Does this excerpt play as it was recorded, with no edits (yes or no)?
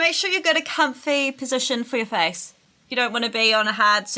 no